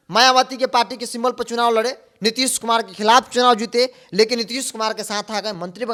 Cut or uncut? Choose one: uncut